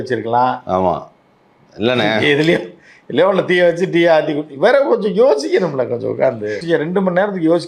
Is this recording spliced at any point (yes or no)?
yes